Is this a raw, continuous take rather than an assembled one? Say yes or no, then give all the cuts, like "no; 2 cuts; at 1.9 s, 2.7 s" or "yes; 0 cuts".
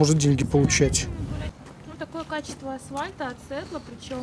yes; 0 cuts